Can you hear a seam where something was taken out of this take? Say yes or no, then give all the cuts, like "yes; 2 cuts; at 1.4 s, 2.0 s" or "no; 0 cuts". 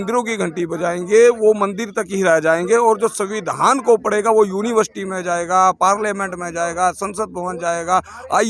no; 0 cuts